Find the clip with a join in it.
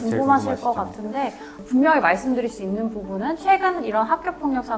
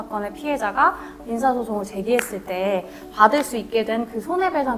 first; 1 cut; at 1.5 s

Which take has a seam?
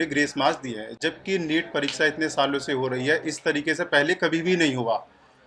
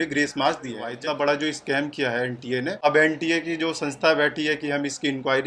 second; 2 cuts; at 0.9 s, 2.7 s

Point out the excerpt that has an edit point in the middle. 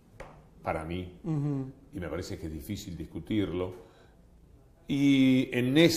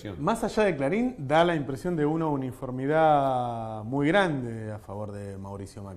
first; 1 cut; at 1.4 s

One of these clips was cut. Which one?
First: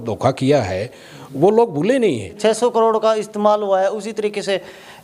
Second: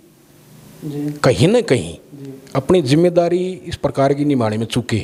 first; 1 cut; at 2.4 s

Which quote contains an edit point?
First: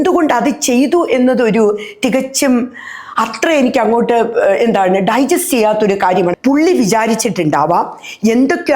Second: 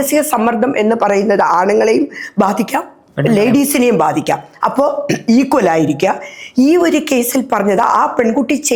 first; 1 cut; at 6.4 s

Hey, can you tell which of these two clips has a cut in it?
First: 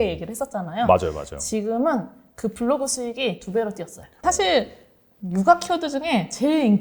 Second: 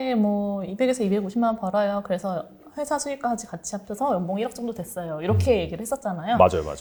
first; 1 cut; at 4.2 s

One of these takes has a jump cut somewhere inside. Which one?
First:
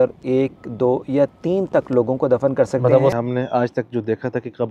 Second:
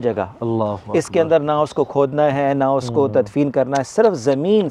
first; 1 cut; at 3.1 s

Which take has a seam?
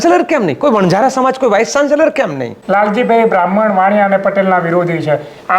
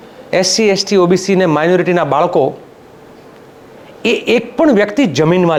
first; 1 cut; at 2.5 s

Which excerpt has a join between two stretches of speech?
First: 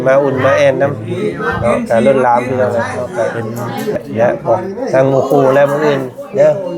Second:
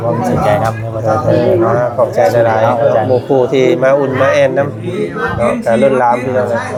first; 1 cut; at 3.9 s

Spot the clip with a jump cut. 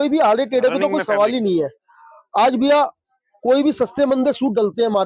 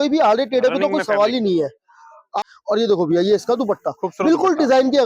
second; 1 cut; at 2.3 s

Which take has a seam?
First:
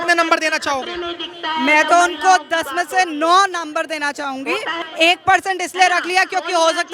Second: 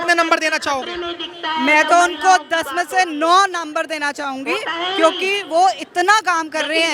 first; 1 cut; at 4.8 s

